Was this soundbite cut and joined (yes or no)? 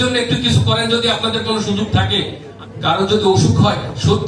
yes